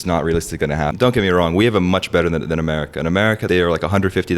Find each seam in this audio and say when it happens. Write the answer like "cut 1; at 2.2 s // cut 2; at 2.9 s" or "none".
cut 1; at 0.9 s // cut 2; at 3.4 s